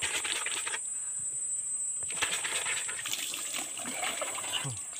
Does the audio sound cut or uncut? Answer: cut